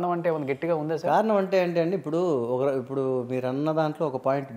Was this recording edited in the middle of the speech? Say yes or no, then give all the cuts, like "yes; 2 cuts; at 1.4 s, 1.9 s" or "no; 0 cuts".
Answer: no; 0 cuts